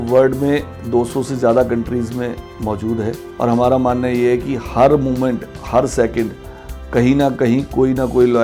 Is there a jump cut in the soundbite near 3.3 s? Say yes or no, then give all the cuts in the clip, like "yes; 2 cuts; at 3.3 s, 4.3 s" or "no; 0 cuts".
yes; 2 cuts; at 2.5 s, 3.3 s